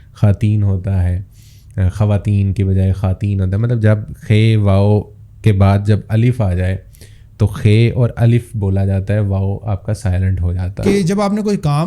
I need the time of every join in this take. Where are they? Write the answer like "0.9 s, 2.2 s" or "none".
10.8 s

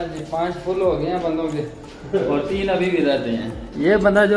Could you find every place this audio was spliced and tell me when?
none

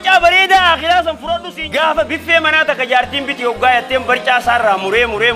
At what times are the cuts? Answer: 1.6 s

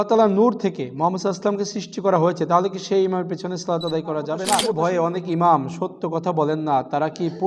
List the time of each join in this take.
4.6 s

